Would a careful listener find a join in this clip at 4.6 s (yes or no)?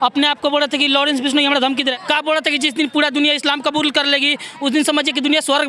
no